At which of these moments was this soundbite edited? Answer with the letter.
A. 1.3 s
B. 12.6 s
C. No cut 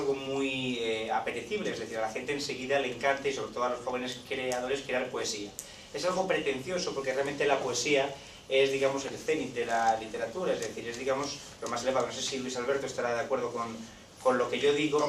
B